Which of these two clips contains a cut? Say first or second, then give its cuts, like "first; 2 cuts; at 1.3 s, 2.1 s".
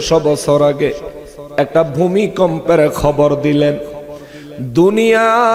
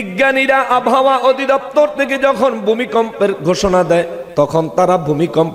second; 1 cut; at 4.2 s